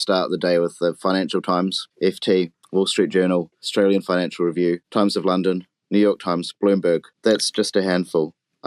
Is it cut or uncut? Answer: cut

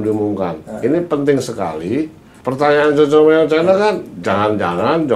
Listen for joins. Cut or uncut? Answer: uncut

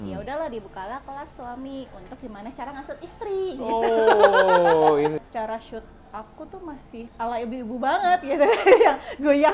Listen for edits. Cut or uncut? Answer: cut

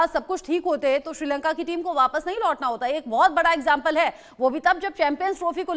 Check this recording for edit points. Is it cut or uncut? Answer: uncut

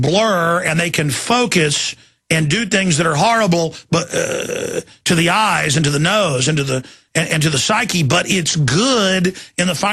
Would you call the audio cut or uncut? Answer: uncut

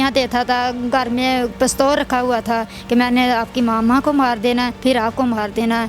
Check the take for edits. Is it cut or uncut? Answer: cut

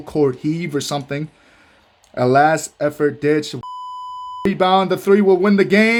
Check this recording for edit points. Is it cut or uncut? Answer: uncut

